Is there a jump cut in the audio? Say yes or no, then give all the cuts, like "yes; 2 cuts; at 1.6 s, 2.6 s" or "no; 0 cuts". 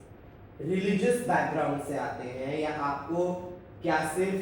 no; 0 cuts